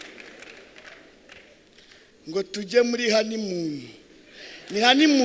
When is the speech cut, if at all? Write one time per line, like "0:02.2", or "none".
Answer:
none